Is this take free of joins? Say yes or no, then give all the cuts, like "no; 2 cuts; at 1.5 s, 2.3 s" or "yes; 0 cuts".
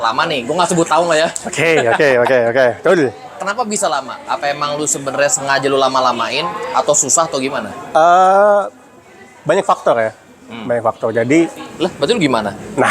no; 1 cut; at 11.6 s